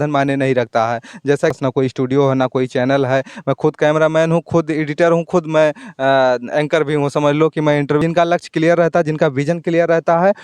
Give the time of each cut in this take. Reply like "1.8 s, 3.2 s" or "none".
1.6 s, 8.0 s